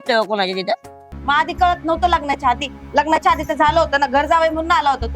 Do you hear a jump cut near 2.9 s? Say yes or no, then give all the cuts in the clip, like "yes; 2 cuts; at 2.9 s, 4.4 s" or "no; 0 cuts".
no; 1 cut; at 1.1 s